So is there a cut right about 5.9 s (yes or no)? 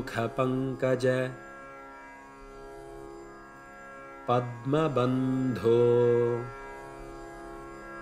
no